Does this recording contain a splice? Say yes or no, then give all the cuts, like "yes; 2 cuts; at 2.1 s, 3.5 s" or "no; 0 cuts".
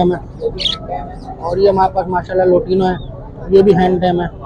no; 0 cuts